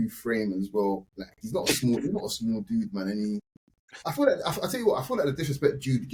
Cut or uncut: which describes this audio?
uncut